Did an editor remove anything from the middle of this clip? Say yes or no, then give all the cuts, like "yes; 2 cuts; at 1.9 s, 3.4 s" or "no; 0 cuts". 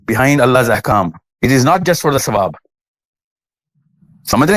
no; 0 cuts